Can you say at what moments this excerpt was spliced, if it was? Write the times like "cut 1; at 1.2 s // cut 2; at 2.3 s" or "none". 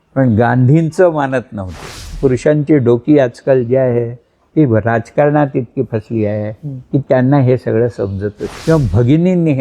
cut 1; at 2.1 s // cut 2; at 8.5 s